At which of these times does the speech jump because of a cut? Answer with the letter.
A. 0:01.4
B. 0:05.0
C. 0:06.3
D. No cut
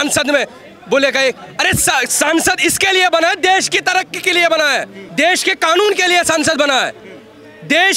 B